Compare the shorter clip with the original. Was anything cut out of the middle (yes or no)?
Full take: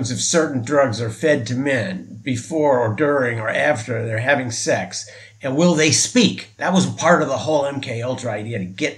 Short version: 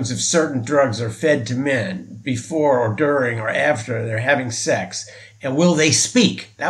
no